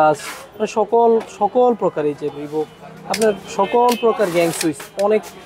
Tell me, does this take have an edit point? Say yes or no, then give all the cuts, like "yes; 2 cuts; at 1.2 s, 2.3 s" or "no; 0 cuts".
no; 0 cuts